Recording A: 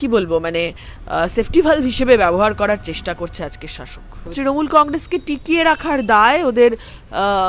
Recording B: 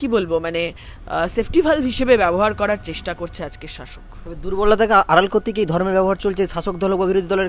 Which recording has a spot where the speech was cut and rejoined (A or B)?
A